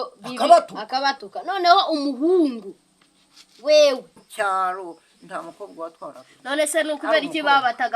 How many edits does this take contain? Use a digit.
1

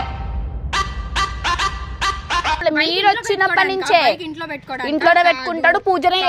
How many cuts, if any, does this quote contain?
1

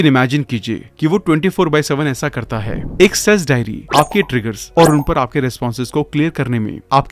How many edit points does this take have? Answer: 1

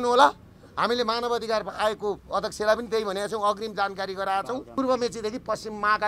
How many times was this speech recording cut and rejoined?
1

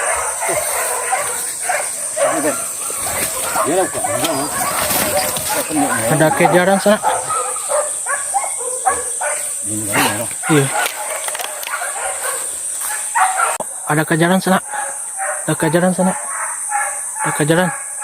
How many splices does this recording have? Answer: 1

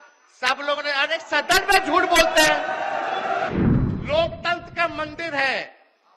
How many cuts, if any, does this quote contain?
1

